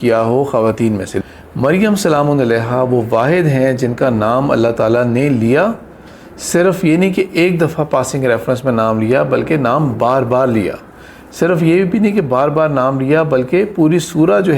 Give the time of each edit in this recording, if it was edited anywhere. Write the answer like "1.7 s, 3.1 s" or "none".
1.2 s